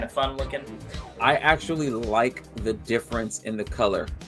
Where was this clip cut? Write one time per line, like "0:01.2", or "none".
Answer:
0:01.1